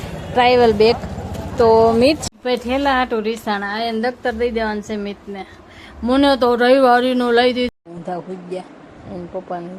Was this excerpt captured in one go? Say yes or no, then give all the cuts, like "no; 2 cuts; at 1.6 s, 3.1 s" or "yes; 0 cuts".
no; 2 cuts; at 2.2 s, 7.7 s